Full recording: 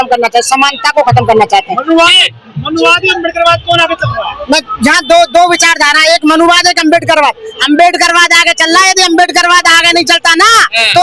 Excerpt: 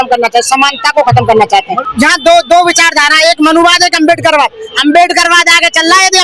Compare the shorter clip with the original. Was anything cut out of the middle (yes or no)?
yes